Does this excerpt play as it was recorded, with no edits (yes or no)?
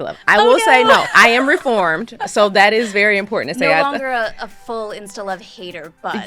yes